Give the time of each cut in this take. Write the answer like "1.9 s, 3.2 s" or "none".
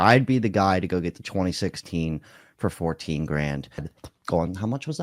3.9 s